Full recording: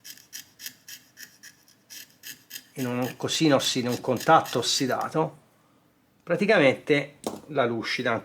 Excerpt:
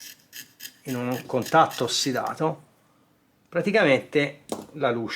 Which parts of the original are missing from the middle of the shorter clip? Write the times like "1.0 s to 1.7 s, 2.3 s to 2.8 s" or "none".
3.2 s to 4.0 s